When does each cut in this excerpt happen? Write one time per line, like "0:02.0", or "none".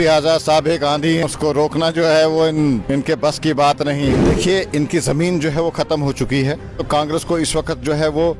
0:01.2
0:02.8
0:04.2
0:06.8